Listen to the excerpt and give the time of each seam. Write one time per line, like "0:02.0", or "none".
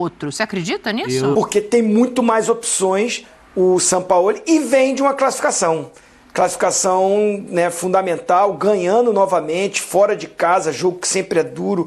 0:01.3